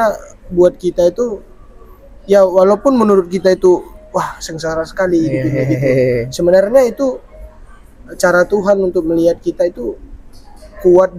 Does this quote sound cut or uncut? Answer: uncut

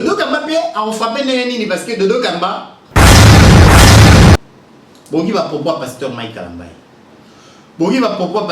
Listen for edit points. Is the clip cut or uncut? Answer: cut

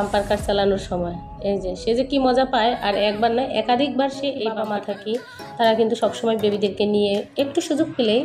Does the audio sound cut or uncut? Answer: cut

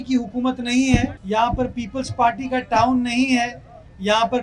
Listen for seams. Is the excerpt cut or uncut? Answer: cut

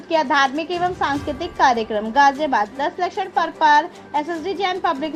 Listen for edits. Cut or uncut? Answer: uncut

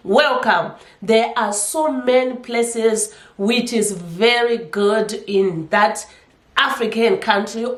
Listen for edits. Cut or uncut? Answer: uncut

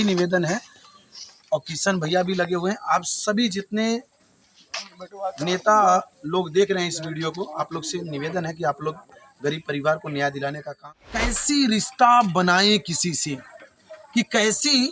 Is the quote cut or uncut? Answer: cut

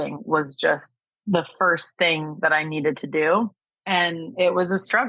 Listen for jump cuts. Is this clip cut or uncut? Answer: cut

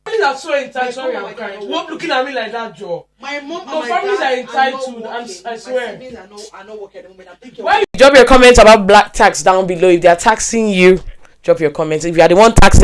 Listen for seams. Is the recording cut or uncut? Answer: cut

